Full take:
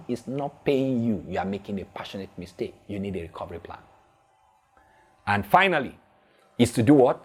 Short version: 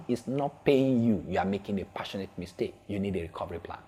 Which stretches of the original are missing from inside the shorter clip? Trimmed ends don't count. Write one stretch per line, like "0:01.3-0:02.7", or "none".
none